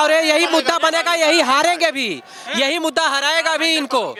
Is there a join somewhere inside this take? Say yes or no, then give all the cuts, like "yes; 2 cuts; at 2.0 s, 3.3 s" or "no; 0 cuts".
no; 0 cuts